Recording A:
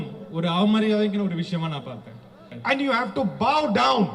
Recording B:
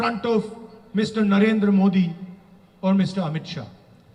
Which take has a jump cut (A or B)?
A